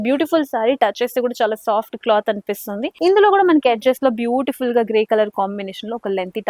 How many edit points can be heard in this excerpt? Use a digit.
1